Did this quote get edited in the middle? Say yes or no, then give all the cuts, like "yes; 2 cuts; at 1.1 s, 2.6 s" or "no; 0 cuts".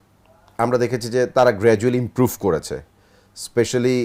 no; 0 cuts